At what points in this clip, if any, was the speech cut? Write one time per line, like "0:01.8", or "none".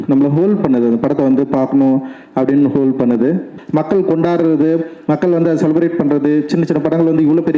0:03.6